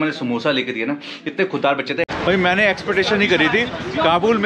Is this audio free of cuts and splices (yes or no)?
no